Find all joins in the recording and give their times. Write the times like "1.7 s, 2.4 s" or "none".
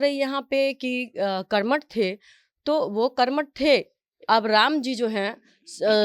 4.1 s